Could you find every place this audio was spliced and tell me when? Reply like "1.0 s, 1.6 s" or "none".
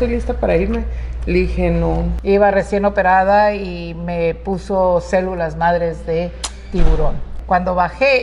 2.1 s, 7.3 s